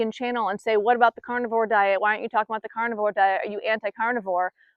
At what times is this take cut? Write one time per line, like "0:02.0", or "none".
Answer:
none